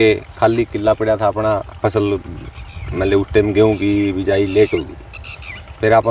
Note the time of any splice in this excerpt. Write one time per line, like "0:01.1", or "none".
none